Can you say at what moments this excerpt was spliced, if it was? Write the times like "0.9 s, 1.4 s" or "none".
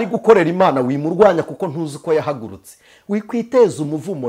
none